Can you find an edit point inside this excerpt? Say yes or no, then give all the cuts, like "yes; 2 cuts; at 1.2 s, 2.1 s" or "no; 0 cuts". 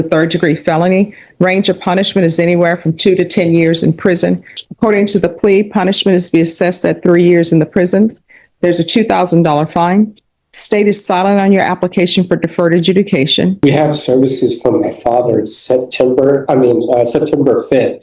yes; 2 cuts; at 4.6 s, 13.6 s